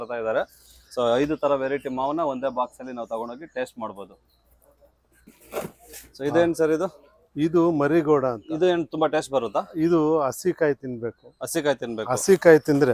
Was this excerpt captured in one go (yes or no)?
yes